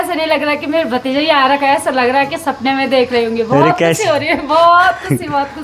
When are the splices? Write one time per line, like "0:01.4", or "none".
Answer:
none